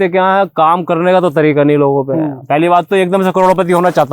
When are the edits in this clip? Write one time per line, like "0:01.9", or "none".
0:02.4